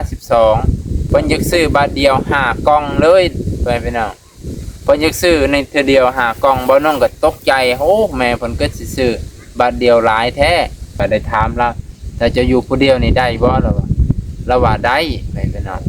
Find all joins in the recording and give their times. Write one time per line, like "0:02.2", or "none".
0:01.0
0:10.9